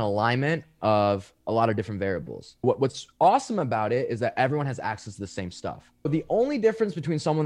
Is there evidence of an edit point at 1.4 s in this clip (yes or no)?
no